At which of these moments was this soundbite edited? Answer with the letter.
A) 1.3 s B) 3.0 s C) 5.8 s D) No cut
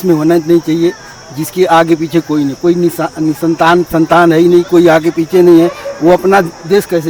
D